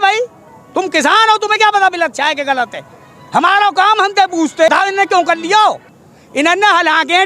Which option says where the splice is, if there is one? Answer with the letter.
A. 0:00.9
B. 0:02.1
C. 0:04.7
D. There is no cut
C